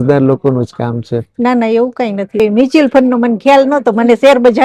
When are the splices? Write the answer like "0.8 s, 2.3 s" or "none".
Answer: 2.4 s